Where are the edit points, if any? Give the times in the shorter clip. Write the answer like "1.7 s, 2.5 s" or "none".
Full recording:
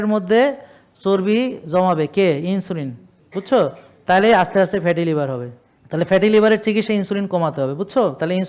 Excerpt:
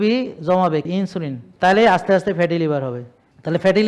1.0 s